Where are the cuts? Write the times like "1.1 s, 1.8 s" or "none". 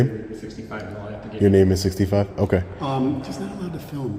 none